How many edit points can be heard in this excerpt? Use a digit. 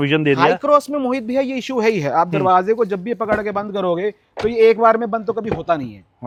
0